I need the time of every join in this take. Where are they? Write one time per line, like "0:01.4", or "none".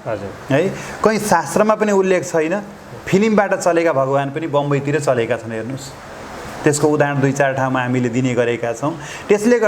none